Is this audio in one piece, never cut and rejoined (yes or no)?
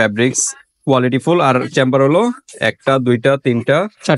yes